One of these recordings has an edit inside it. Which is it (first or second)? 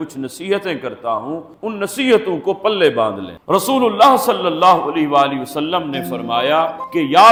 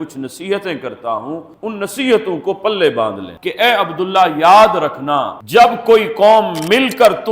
second